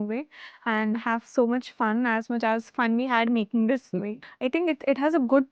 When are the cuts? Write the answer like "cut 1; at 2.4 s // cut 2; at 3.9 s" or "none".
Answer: cut 1; at 4.2 s